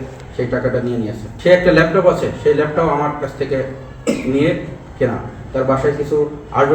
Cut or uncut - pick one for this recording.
cut